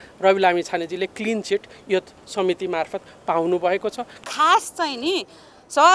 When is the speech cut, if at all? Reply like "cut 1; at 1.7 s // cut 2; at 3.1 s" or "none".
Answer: cut 1; at 4.1 s